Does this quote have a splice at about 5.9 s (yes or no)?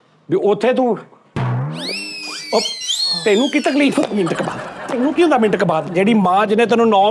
yes